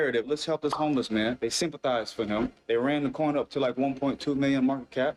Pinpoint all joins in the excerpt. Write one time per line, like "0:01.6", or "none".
none